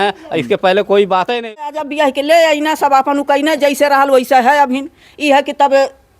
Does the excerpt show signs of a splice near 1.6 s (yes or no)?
yes